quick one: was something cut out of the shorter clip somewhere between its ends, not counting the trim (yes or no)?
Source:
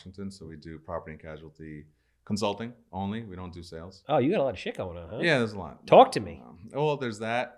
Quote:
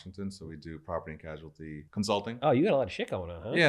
yes